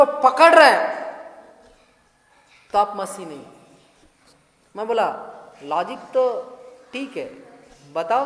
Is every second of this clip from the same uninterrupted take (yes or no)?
yes